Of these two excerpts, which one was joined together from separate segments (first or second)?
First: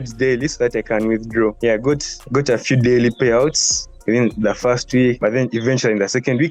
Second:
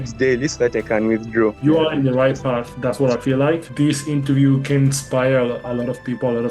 second